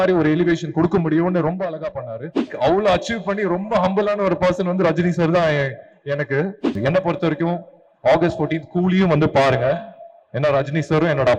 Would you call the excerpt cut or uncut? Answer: cut